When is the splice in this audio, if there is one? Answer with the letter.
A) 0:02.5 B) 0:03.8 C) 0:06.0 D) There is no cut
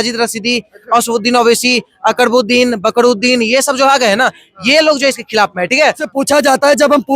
C